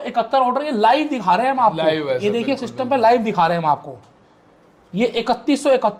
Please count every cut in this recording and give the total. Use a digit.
0